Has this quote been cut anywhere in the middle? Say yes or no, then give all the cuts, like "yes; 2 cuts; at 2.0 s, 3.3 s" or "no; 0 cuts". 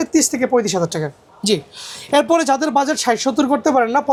no; 0 cuts